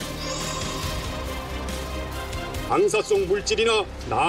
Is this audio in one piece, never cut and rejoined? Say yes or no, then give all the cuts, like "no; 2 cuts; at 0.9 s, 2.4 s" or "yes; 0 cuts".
no; 1 cut; at 2.5 s